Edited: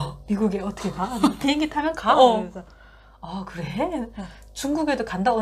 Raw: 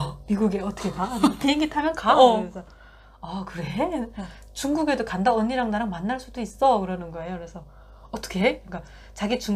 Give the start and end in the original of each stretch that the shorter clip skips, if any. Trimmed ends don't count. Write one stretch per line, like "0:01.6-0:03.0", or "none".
none